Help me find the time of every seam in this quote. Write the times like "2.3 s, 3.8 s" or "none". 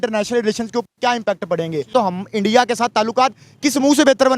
1.9 s